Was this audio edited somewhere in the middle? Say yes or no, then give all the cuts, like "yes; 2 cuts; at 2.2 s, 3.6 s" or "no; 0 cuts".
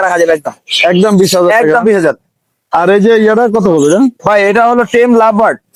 no; 0 cuts